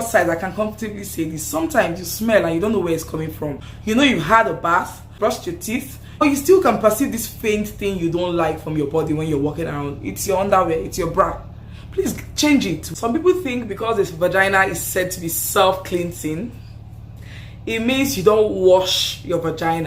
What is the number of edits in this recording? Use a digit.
4